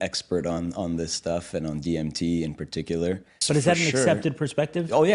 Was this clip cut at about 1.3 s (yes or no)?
no